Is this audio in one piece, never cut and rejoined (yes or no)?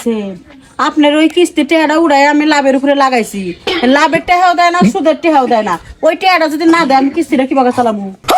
yes